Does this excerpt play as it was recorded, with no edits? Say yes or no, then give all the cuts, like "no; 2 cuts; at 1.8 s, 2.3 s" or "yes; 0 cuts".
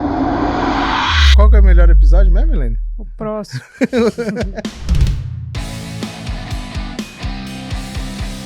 yes; 0 cuts